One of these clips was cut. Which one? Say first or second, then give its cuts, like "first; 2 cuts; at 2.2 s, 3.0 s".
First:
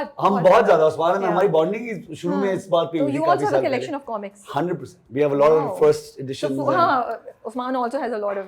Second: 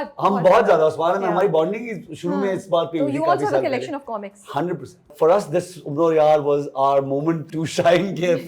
second; 2 cuts; at 5.1 s, 7.5 s